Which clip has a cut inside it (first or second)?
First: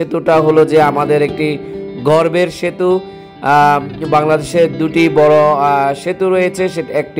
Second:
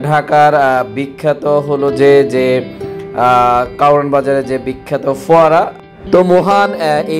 second